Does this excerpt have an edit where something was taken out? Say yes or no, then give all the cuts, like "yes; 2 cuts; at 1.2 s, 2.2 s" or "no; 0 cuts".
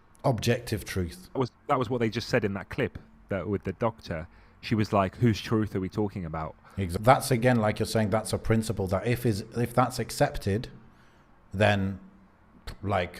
yes; 2 cuts; at 1.4 s, 6.9 s